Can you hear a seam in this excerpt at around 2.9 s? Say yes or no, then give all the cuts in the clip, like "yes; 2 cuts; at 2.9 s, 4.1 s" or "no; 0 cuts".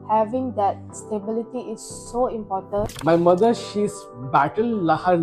yes; 1 cut; at 2.9 s